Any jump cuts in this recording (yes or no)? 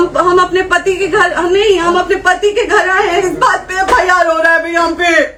no